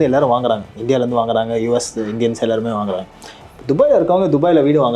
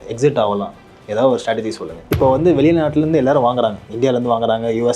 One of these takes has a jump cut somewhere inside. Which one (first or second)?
second